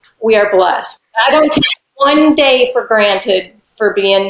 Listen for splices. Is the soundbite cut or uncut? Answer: cut